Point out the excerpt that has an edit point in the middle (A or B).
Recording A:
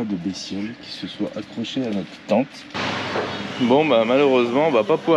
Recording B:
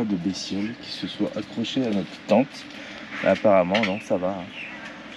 A